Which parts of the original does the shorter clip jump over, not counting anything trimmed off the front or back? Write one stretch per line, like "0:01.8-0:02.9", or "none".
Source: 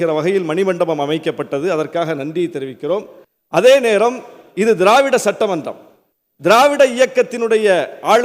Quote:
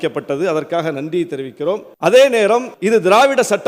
0:03.1-0:03.4
0:04.2-0:04.5